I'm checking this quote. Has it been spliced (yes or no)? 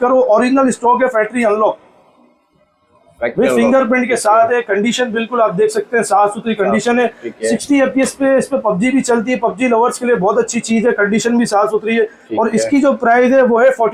no